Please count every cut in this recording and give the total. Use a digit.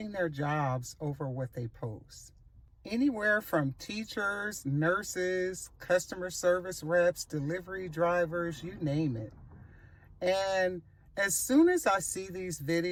0